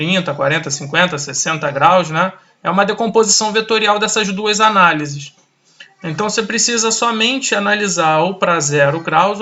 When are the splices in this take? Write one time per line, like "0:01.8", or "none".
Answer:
none

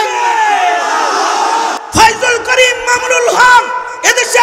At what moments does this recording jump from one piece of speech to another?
0:01.8

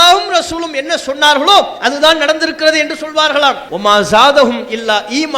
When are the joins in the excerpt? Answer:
0:03.7

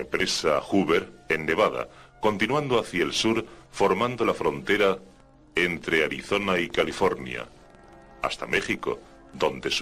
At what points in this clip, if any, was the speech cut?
0:02.9

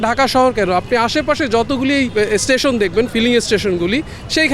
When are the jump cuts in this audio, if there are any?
0:02.1

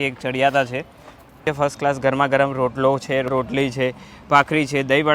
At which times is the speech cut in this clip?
0:01.4
0:03.3

